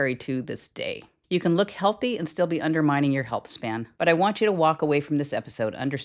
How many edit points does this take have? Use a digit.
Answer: 2